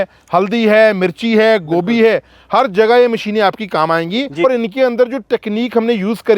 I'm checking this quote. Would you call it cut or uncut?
cut